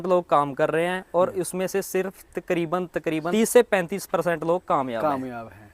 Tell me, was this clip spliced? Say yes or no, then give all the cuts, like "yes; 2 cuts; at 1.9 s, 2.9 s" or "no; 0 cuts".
no; 0 cuts